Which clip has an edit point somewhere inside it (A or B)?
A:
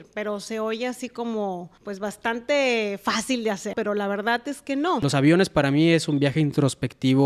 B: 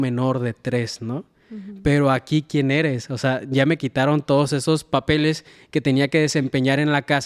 A